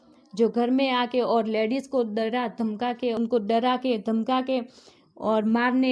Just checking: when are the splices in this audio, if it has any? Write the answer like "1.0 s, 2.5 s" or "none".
3.2 s